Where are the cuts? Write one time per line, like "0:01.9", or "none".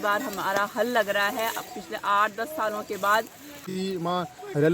0:03.6